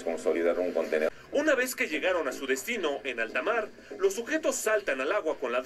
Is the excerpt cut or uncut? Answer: cut